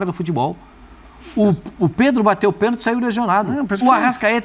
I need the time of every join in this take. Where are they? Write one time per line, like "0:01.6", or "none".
none